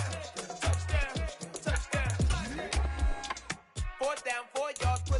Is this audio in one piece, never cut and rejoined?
no; 1 cut; at 2.7 s

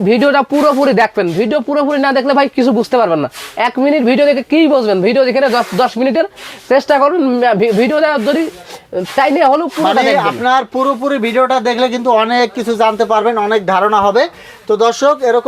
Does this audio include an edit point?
no; 0 cuts

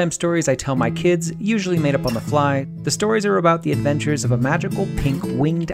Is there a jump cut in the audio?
yes; 1 cut; at 2.7 s

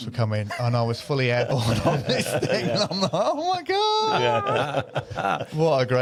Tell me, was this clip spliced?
no; 0 cuts

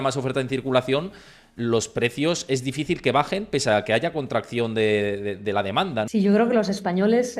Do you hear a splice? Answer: yes; 1 cut; at 6.1 s

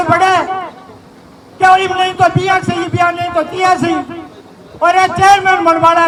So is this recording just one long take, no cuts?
yes; 0 cuts

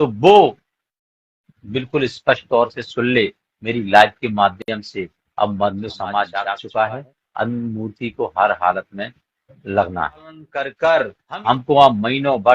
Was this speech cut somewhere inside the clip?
yes; 2 cuts; at 6.4 s, 10.7 s

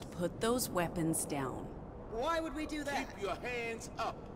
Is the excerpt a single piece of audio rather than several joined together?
yes; 0 cuts

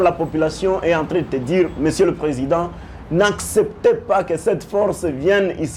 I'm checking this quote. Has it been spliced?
no; 0 cuts

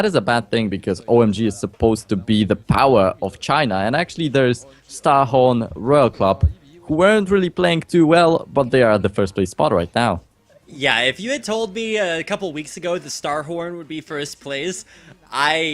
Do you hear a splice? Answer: yes; 1 cut; at 11.7 s

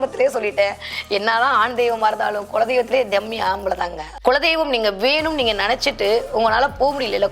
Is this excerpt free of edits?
no; 1 cut; at 4.0 s

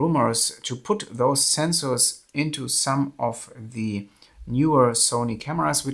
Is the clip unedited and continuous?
yes; 0 cuts

